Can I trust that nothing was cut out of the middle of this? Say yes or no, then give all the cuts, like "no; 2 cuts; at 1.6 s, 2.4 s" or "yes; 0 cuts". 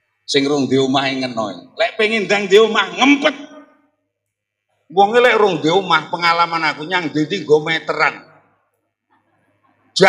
yes; 0 cuts